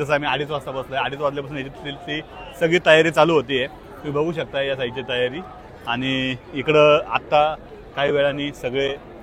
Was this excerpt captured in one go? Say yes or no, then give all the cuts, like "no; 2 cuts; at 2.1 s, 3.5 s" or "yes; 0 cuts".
yes; 0 cuts